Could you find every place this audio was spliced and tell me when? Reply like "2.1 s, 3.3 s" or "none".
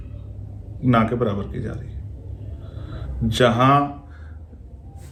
none